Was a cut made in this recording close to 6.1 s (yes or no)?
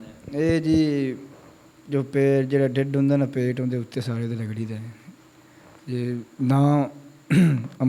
no